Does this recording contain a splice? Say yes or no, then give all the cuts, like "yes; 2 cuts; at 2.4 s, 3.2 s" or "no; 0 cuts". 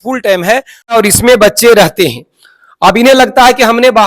yes; 1 cut; at 0.9 s